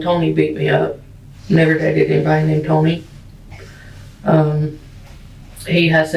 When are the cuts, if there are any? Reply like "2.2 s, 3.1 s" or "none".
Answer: none